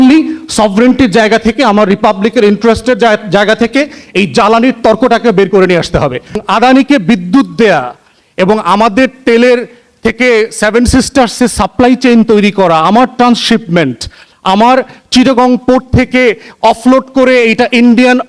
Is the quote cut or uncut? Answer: cut